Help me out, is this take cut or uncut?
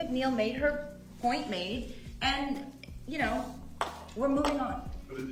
uncut